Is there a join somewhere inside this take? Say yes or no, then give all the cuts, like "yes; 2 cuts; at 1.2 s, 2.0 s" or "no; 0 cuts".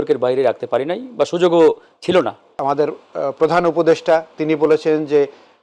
yes; 1 cut; at 2.6 s